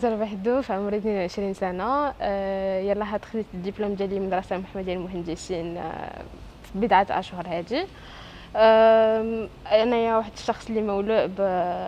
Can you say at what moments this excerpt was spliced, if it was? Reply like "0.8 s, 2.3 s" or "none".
none